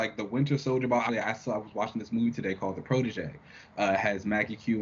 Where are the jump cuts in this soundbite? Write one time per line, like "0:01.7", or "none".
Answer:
0:01.1